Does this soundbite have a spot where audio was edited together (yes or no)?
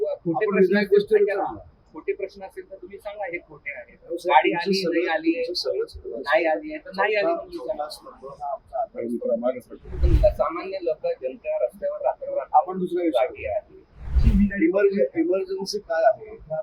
yes